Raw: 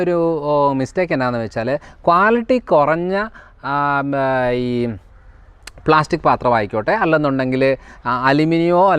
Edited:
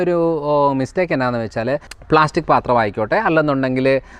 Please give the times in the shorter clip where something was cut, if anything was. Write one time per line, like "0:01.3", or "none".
0:01.9